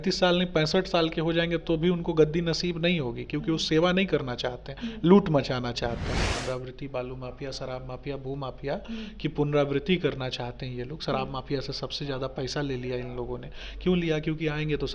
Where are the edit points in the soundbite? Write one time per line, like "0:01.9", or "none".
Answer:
0:06.3

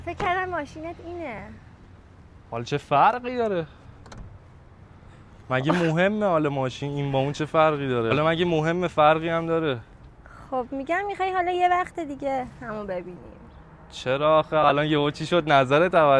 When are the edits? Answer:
none

